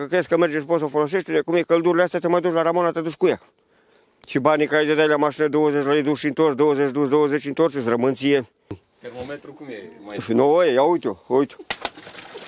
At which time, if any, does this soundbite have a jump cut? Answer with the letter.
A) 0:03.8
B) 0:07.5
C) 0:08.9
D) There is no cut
C